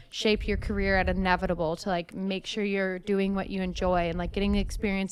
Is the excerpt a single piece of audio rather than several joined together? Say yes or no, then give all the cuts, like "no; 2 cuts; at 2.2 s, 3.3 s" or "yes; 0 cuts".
yes; 0 cuts